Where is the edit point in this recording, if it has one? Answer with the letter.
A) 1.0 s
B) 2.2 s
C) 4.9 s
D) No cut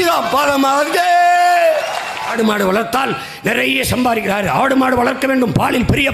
B